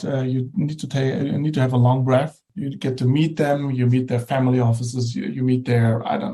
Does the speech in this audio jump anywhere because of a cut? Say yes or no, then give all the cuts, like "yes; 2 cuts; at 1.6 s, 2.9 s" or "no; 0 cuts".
yes; 1 cut; at 2.5 s